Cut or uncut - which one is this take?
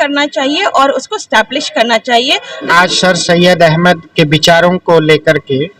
cut